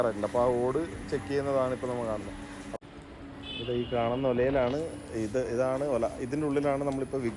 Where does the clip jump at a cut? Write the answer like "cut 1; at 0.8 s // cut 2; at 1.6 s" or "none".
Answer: cut 1; at 2.8 s